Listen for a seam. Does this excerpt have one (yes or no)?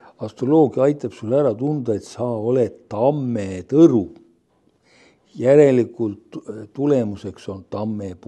no